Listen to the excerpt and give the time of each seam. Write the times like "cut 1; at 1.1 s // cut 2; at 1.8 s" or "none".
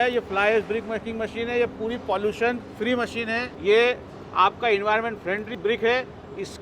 cut 1; at 5.5 s